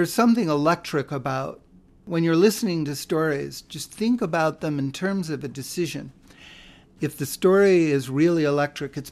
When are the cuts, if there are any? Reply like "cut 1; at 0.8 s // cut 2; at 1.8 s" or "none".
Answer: cut 1; at 2.0 s